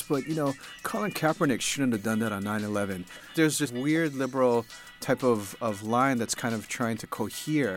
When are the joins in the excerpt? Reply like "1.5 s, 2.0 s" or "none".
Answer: 3.3 s